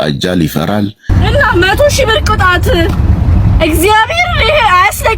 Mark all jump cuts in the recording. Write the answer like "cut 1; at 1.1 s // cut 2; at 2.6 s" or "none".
cut 1; at 1.1 s